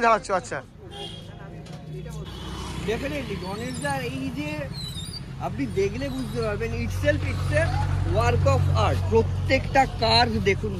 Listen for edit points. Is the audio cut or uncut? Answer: cut